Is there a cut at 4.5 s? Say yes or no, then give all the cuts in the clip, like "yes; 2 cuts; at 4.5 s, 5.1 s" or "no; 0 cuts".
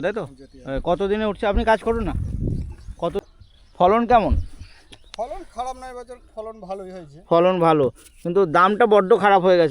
no; 1 cut; at 3.2 s